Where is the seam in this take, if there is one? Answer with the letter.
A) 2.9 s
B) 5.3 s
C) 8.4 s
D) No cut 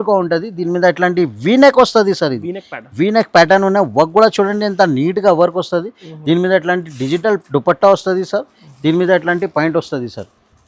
D